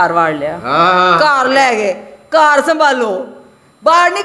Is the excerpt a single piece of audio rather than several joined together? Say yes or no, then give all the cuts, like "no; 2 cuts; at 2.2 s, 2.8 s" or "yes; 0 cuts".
yes; 0 cuts